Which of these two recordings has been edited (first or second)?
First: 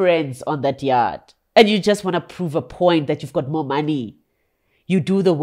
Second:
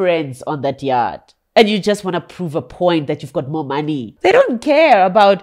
second